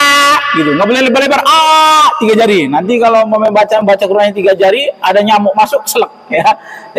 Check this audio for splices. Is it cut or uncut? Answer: uncut